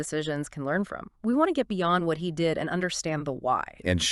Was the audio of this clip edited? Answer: yes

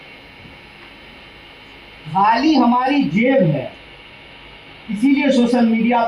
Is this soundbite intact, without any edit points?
yes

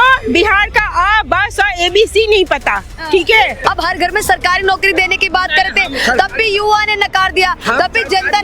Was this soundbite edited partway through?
yes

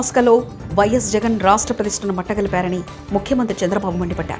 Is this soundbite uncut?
yes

